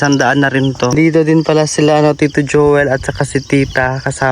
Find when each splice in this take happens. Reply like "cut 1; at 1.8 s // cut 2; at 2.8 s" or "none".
cut 1; at 0.9 s